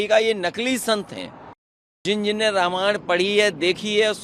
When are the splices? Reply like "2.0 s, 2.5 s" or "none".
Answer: 2.0 s